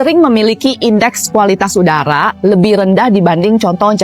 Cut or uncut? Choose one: uncut